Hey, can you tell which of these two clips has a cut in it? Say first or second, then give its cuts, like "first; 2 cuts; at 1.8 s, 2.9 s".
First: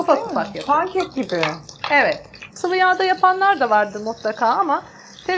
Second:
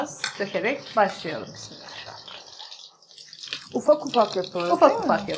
first; 1 cut; at 2.4 s